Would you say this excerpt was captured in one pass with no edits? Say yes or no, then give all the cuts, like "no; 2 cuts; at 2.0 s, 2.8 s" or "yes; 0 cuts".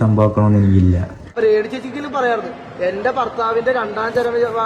no; 1 cut; at 1.2 s